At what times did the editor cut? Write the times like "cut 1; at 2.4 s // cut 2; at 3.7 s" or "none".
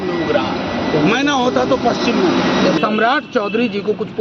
cut 1; at 2.8 s